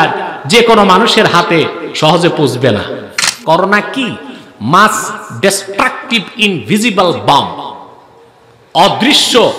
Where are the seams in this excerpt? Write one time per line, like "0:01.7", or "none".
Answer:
0:03.3